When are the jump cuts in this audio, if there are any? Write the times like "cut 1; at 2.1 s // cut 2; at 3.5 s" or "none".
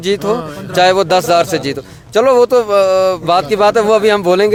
none